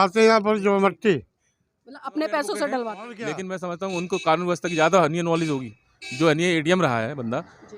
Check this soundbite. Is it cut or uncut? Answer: cut